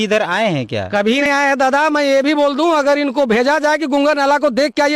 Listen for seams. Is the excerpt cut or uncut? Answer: cut